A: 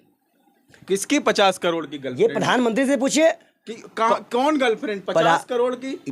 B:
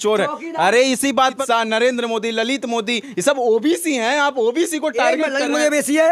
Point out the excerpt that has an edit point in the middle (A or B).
B